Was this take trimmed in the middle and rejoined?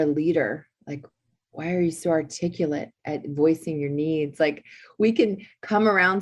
yes; 1 cut; at 3.0 s

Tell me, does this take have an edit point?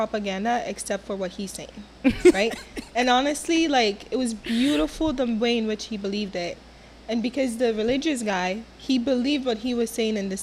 no; 0 cuts

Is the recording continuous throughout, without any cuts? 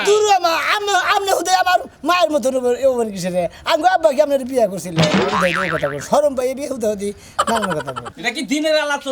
no; 1 cut; at 8.1 s

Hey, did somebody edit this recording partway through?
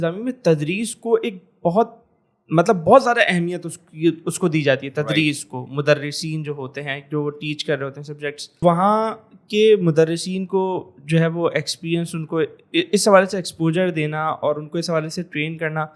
yes; 1 cut; at 8.6 s

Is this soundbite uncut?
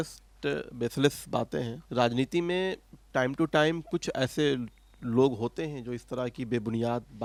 yes; 0 cuts

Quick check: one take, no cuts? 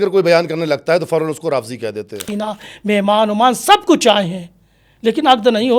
no; 1 cut; at 2.2 s

